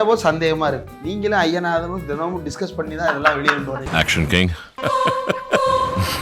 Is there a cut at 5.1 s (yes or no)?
no